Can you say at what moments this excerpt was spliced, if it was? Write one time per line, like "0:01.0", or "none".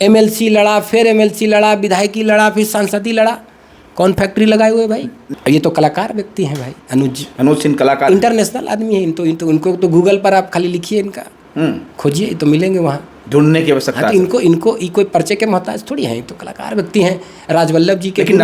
0:05.2